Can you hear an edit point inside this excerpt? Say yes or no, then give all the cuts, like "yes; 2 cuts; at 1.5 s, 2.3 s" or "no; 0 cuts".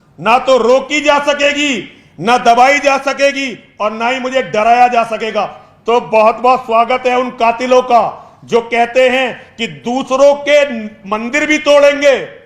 no; 0 cuts